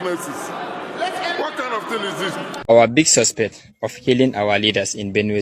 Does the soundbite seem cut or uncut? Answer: cut